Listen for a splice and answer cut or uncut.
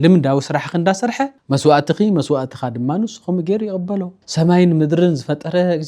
cut